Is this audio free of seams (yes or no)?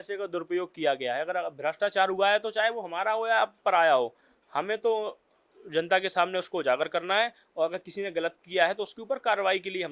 yes